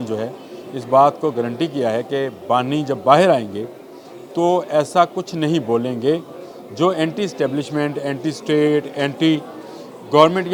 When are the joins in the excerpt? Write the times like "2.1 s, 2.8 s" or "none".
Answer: none